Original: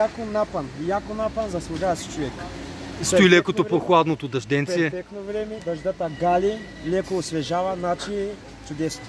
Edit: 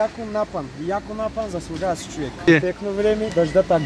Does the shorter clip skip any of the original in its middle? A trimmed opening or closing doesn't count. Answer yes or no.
yes